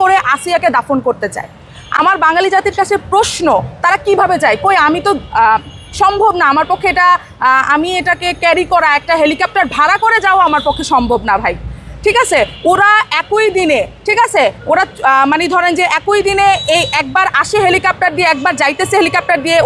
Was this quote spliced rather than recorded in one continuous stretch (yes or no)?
no